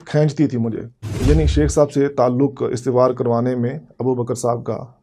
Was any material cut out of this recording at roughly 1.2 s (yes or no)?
yes